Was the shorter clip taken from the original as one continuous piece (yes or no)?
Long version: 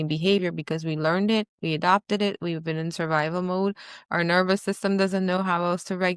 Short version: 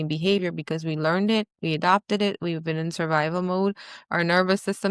yes